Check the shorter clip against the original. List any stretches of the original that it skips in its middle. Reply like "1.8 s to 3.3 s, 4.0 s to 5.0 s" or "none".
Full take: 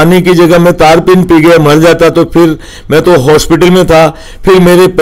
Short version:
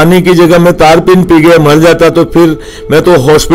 none